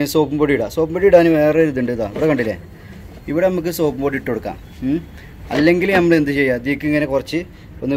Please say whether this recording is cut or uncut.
uncut